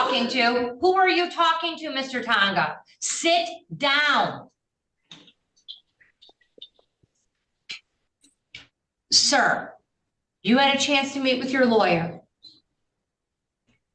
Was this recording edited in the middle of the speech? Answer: no; 0 cuts

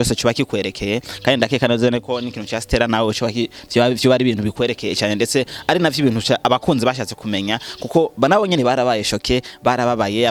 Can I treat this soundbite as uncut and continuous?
yes; 0 cuts

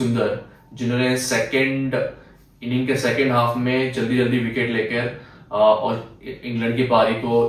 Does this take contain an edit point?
no; 0 cuts

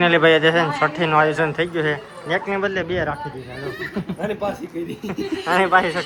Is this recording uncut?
yes; 0 cuts

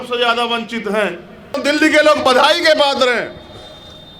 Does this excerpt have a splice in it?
yes; 1 cut; at 1.6 s

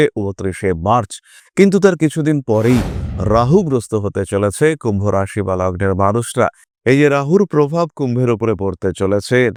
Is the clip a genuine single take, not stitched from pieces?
yes; 0 cuts

